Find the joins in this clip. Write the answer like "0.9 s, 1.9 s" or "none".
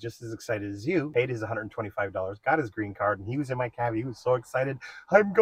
none